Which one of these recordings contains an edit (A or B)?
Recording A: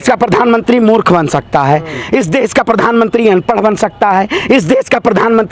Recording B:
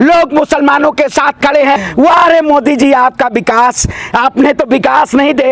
B